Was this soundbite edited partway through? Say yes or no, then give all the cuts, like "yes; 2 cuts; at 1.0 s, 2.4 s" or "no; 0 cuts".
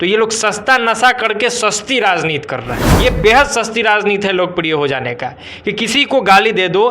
yes; 1 cut; at 2.8 s